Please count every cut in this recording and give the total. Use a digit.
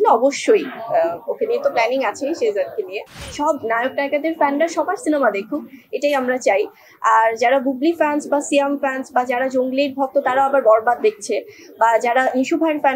1